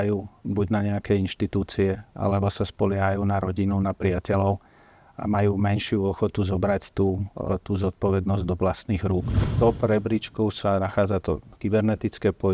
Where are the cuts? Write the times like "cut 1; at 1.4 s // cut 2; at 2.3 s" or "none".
cut 1; at 9.5 s